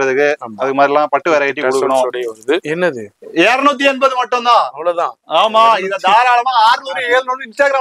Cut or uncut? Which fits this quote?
cut